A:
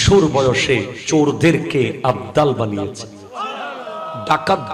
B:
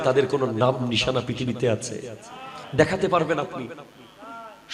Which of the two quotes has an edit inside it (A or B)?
A